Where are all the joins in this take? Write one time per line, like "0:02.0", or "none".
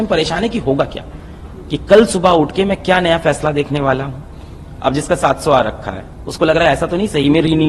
none